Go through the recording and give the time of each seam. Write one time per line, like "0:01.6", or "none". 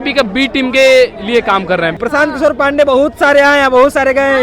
0:02.0